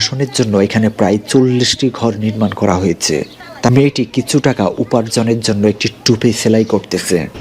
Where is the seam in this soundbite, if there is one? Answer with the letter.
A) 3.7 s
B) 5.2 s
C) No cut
A